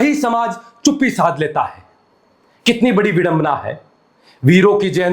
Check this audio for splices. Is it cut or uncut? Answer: uncut